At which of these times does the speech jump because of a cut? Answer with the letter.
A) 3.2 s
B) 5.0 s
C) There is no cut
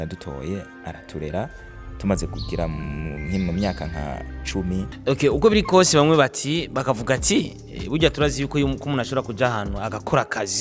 B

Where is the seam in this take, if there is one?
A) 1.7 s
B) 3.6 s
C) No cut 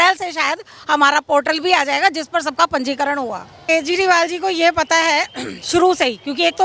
B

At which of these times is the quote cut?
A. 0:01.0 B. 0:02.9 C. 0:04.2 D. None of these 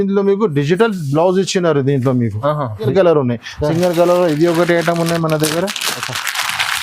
B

